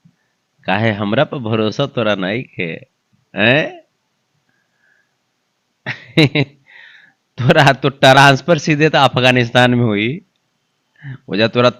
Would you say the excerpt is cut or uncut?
uncut